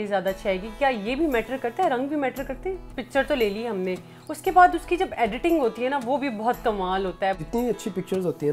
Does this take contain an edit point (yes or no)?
yes